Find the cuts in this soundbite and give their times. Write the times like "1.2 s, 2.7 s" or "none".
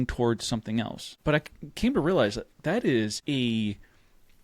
1.0 s, 3.2 s